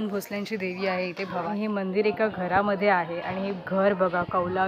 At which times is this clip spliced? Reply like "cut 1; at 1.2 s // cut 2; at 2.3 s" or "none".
cut 1; at 1.5 s